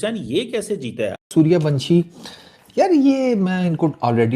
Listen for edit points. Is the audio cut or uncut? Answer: cut